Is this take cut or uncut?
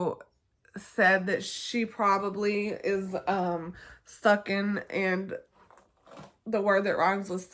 uncut